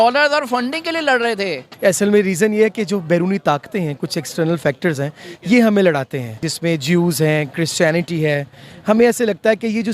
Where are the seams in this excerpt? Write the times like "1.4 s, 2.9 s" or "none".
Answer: 1.7 s, 6.5 s